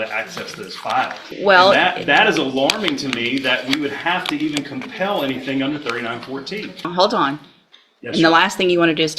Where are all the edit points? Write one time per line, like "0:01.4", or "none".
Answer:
0:01.2
0:06.9